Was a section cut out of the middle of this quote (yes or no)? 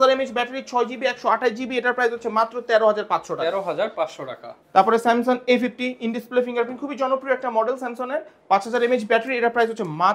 no